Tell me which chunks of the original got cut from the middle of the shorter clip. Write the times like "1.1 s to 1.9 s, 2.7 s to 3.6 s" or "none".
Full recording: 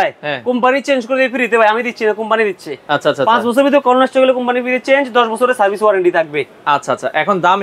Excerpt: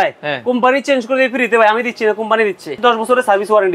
2.8 s to 5.1 s